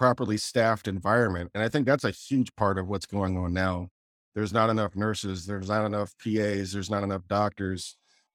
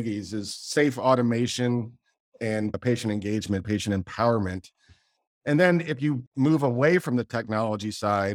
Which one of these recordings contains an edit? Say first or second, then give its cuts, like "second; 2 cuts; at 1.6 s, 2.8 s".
second; 1 cut; at 6.3 s